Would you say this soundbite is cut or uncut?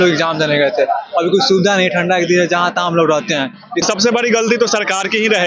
cut